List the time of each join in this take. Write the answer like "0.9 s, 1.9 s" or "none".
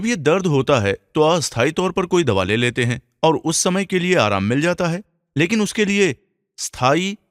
1.0 s